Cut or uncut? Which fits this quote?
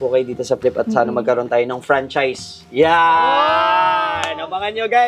uncut